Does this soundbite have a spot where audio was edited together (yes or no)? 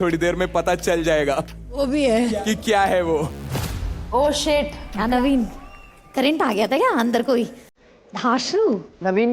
yes